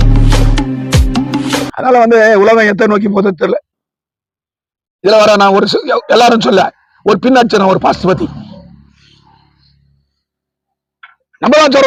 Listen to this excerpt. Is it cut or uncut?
uncut